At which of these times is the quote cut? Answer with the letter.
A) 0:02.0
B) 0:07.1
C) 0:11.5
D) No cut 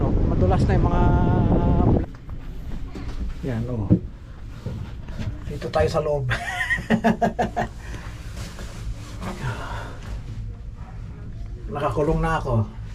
A